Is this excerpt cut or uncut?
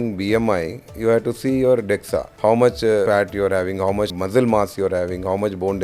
cut